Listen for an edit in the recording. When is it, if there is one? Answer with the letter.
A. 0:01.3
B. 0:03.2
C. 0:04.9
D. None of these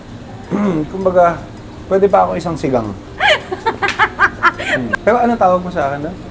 C